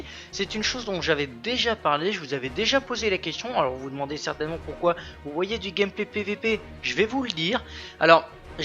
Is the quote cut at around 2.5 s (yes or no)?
yes